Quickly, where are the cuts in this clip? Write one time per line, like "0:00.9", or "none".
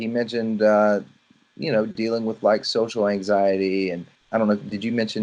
0:04.1